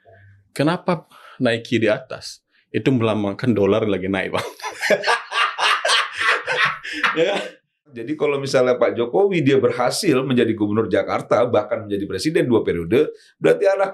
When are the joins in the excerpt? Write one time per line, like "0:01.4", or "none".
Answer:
0:08.1